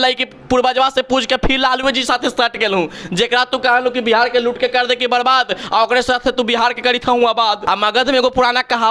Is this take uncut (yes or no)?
no